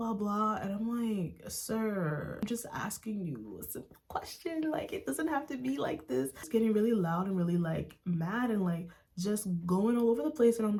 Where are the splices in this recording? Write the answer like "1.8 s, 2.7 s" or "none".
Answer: none